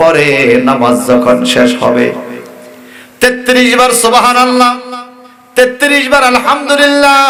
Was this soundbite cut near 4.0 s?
no; 0 cuts

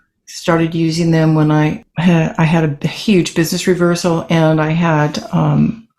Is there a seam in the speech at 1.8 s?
yes; 1 cut; at 1.8 s

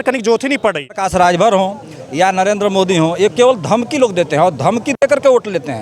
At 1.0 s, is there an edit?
yes; 1 cut; at 1.0 s

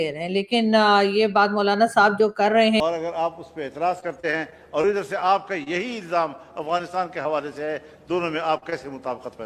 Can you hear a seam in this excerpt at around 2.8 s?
yes; 1 cut; at 2.8 s

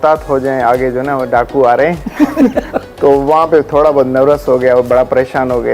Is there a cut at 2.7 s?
yes; 1 cut; at 2.7 s

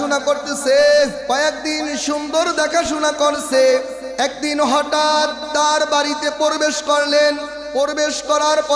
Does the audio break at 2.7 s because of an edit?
no; 3 cuts; at 1.2 s, 4.0 s, 7.6 s

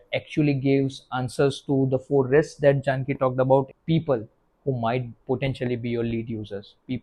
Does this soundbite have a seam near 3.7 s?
yes; 1 cut; at 3.7 s

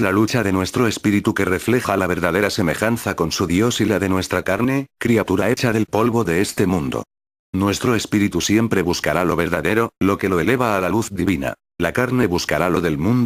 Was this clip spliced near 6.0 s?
no; 1 cut; at 9.1 s

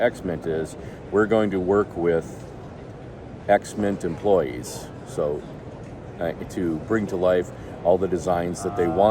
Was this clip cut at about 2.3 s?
no; 0 cuts

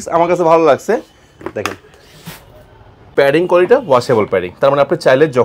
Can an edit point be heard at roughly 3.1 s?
yes; 1 cut; at 3.1 s

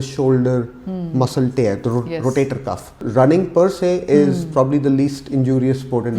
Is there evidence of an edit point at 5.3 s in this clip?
no; 1 cut; at 2.9 s

